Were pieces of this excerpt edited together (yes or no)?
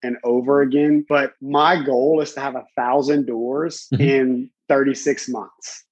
yes